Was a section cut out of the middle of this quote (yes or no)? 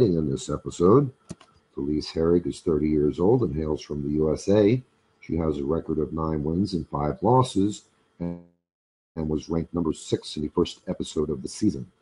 no